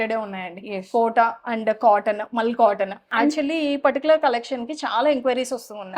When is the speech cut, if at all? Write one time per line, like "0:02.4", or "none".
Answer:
0:03.1